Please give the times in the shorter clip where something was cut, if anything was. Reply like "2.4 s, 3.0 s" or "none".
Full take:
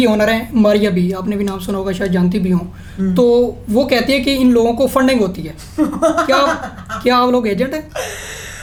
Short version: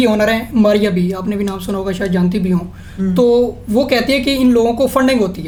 none